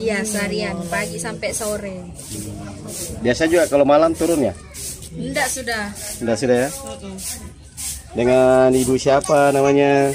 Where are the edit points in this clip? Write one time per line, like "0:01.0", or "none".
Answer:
none